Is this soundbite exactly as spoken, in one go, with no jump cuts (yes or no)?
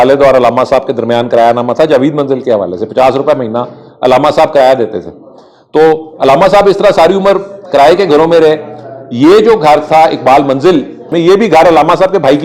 no